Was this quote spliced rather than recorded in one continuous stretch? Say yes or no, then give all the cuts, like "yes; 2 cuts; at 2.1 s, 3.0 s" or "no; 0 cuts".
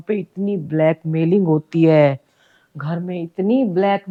no; 0 cuts